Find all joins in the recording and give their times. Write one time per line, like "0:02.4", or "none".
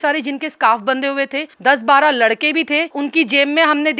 0:01.5
0:02.9